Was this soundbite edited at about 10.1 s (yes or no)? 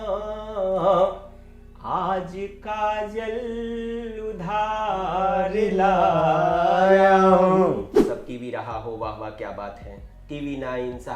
yes